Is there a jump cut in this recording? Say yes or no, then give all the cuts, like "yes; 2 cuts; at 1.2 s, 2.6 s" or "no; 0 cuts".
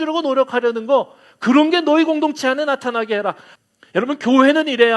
yes; 1 cut; at 3.5 s